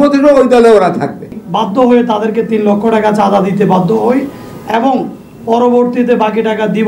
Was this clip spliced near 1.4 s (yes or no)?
yes